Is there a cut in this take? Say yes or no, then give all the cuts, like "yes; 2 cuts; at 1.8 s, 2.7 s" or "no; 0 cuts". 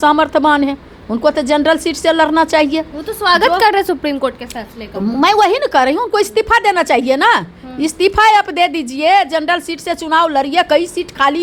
no; 0 cuts